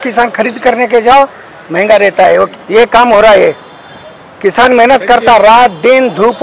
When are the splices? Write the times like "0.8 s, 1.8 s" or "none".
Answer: 2.5 s